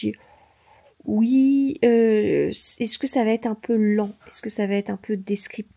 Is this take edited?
no; 0 cuts

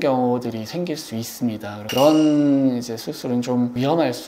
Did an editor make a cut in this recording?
yes; 1 cut; at 1.8 s

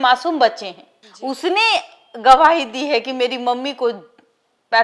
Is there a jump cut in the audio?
no; 0 cuts

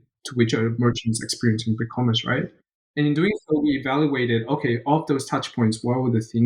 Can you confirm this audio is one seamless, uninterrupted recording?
no; 1 cut; at 3.0 s

